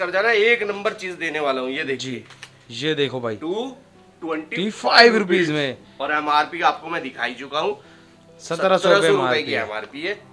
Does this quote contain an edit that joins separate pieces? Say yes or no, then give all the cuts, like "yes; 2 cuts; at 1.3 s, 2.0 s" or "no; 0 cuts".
no; 0 cuts